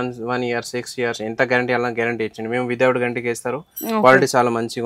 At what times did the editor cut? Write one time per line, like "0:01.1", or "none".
none